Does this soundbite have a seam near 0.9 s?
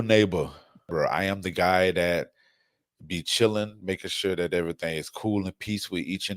yes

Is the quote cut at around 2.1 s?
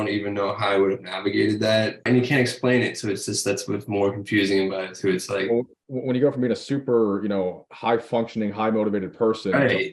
yes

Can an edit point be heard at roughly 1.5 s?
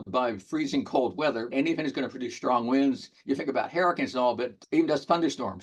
yes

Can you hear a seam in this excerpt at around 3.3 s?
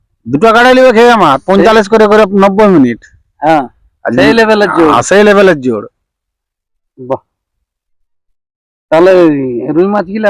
no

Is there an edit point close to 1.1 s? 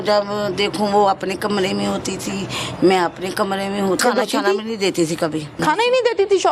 no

